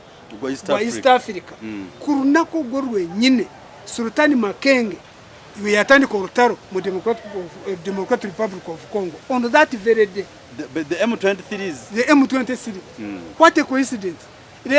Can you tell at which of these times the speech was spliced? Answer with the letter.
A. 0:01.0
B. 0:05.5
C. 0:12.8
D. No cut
D